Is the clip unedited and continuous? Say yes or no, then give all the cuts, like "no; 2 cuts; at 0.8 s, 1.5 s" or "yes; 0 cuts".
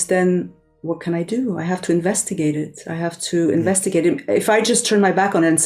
yes; 0 cuts